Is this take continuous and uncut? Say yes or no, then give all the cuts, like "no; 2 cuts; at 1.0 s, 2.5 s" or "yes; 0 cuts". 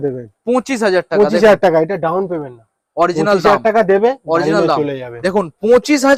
yes; 0 cuts